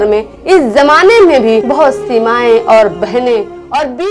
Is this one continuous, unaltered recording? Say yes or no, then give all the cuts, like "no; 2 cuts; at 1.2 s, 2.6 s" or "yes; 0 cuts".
yes; 0 cuts